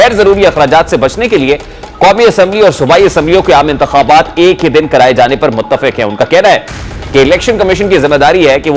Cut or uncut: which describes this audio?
uncut